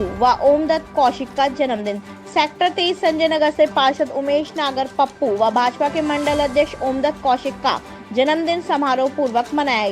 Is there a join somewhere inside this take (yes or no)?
no